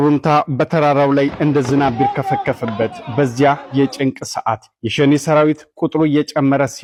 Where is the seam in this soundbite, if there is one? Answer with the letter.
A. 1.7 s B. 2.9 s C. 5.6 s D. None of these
D